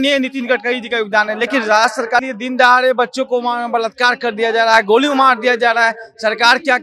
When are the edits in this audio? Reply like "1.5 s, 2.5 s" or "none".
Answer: 2.3 s